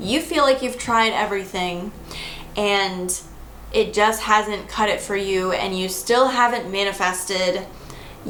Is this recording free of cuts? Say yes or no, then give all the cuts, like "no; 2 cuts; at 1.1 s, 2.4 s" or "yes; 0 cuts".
yes; 0 cuts